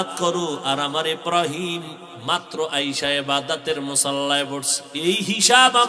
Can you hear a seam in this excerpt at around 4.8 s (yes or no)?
yes